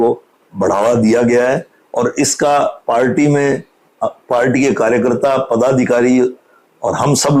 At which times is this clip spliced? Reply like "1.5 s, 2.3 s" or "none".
none